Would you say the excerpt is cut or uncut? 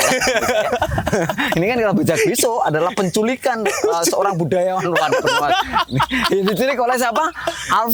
uncut